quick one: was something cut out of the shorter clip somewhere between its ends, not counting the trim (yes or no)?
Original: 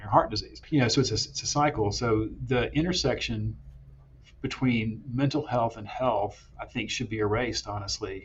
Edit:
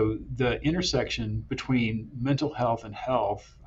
yes